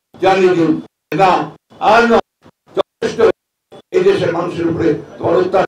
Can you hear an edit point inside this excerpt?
no; 0 cuts

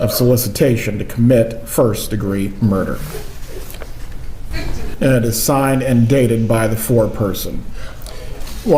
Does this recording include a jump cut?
no; 0 cuts

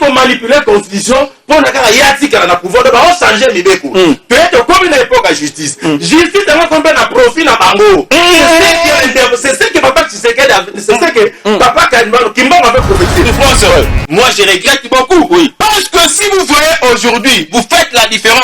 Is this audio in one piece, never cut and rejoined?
no; 1 cut; at 13.3 s

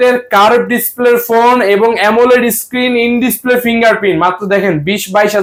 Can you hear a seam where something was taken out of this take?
no; 0 cuts

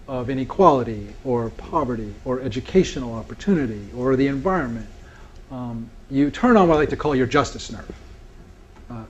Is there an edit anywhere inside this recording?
yes; 1 cut; at 7.1 s

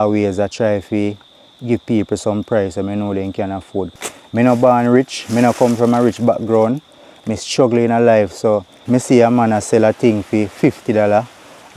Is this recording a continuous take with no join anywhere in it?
no; 2 cuts; at 3.9 s, 8.8 s

